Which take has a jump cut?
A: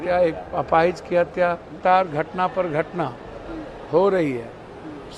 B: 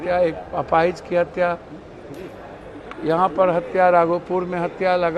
A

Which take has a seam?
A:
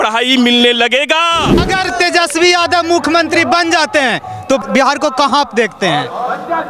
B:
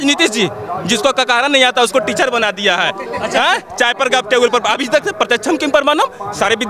A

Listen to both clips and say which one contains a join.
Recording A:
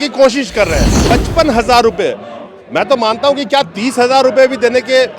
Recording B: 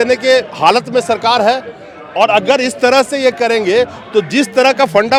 A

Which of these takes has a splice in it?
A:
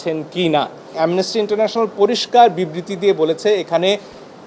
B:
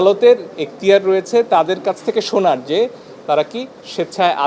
A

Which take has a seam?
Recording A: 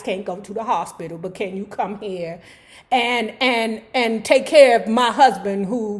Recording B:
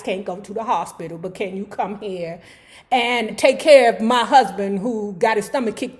B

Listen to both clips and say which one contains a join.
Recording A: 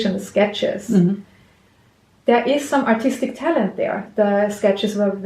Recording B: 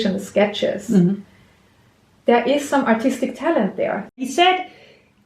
B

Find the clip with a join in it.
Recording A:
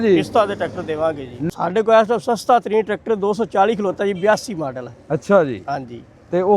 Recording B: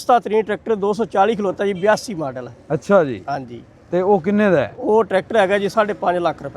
A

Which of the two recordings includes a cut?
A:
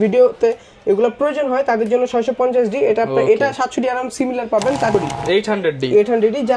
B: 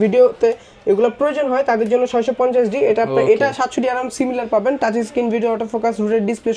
A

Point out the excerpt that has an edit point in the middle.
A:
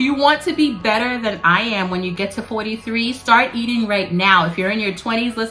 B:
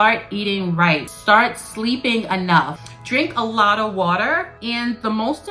B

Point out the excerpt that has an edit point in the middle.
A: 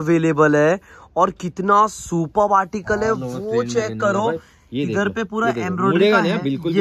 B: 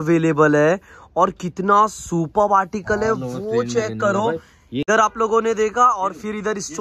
B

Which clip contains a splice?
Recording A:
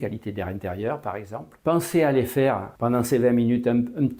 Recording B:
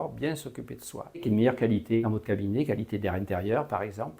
B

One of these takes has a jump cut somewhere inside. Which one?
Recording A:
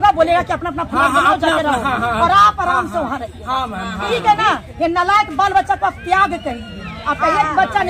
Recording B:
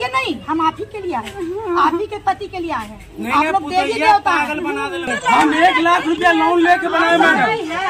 B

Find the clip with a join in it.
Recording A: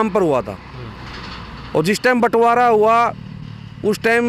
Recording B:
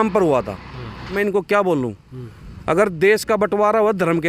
B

